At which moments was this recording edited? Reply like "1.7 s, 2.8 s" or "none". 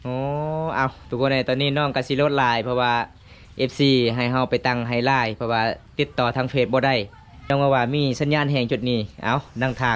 7.5 s